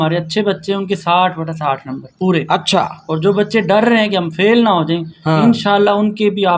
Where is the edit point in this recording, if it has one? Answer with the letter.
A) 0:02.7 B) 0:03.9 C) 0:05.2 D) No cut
D